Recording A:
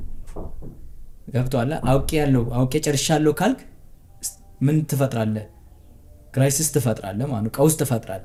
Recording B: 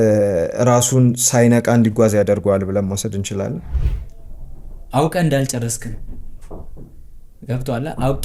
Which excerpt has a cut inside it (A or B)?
B